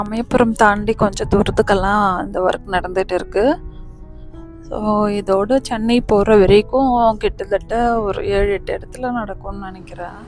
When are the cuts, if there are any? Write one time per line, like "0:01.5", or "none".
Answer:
none